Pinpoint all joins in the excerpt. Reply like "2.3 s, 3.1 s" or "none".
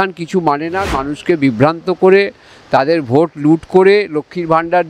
1.0 s